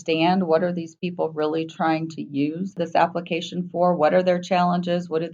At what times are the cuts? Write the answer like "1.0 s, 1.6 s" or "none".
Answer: 2.8 s